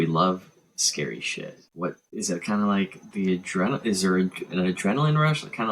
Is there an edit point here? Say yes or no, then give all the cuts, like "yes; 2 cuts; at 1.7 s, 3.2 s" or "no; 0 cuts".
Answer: yes; 1 cut; at 2.0 s